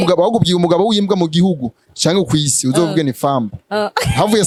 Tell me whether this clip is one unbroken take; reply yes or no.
yes